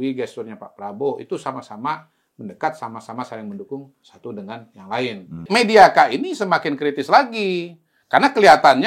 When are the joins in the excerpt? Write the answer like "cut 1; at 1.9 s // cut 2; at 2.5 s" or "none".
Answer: cut 1; at 5.4 s